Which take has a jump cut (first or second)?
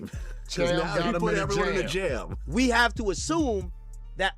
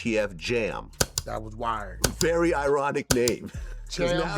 first